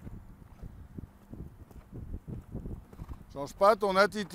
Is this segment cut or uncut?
cut